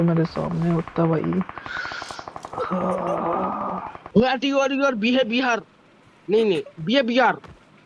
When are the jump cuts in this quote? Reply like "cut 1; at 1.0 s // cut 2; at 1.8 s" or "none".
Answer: cut 1; at 4.0 s